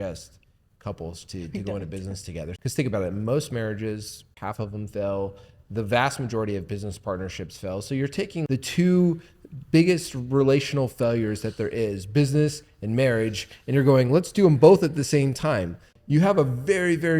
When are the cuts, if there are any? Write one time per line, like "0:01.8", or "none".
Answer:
0:02.5
0:04.3
0:08.5
0:15.9